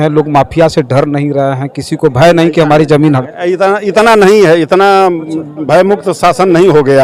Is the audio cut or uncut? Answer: uncut